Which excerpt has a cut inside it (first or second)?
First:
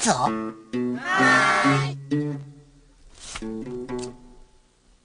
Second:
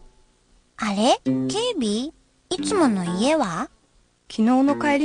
first